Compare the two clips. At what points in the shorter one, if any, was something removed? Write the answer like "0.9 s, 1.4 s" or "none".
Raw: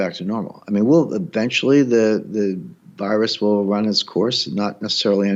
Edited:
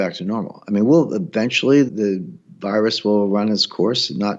1.9 s